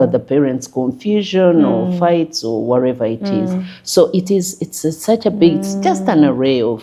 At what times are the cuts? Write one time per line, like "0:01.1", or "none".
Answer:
none

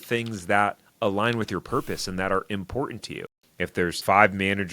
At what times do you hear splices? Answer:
0:03.6

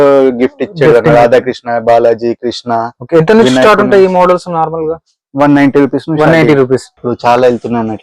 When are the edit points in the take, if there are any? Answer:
0:06.9

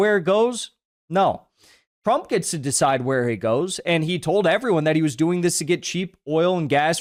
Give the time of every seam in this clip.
none

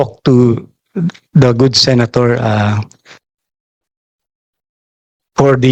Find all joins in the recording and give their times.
none

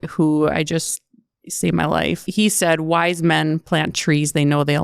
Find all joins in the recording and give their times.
0:02.3

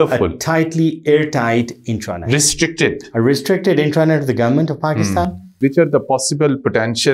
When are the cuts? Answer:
0:05.6

